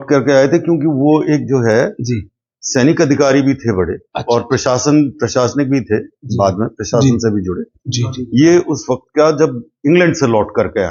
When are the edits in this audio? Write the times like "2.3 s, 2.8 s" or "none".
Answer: none